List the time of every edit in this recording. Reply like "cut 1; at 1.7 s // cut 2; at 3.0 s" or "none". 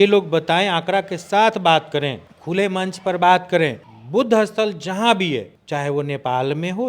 cut 1; at 5.6 s